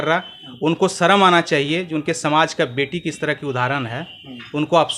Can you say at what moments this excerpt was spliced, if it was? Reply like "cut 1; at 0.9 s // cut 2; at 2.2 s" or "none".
none